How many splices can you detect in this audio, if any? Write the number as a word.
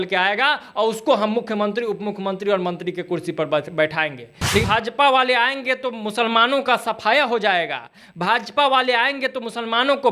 one